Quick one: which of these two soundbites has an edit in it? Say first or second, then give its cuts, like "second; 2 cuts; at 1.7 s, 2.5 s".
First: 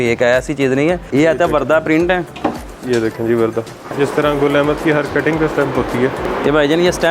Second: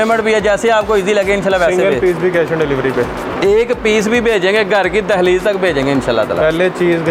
first; 4 cuts; at 1.1 s, 2.7 s, 3.9 s, 6.2 s